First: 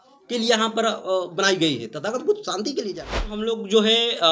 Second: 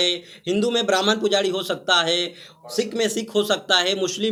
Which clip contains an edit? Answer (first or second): first